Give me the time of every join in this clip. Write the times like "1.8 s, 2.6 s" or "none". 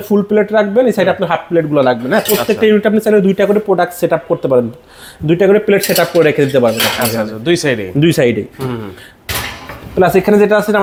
none

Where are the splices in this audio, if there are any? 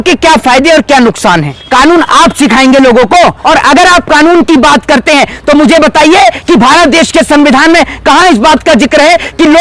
1.6 s, 3.4 s

